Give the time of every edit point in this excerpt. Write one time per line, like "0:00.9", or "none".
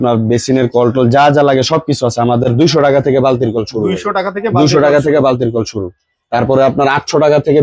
none